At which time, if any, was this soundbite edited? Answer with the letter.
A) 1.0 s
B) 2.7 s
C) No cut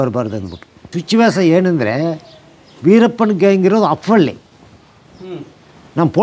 A